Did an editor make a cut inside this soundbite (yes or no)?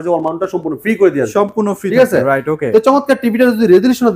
no